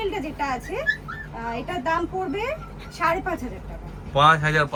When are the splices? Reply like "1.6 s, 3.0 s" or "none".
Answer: none

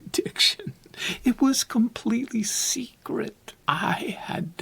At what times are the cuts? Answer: 3.5 s

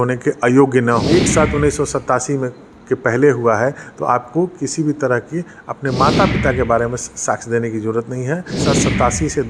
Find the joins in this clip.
1.0 s, 8.6 s

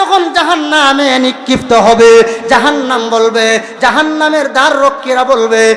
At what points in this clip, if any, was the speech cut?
none

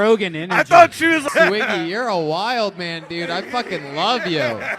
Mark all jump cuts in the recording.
1.3 s

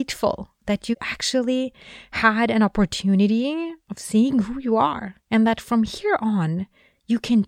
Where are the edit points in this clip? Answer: 1.0 s

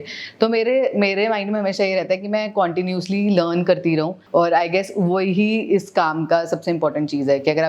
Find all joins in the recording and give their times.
4.2 s

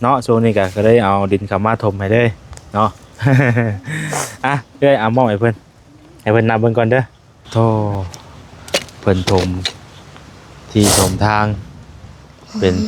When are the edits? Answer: 7.5 s

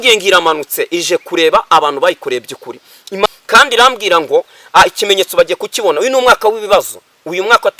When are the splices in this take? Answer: 3.3 s

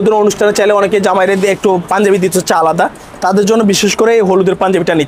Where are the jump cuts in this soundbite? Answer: none

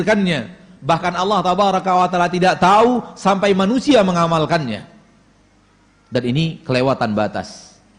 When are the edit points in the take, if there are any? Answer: none

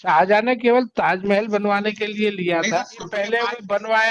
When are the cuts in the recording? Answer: 3.1 s

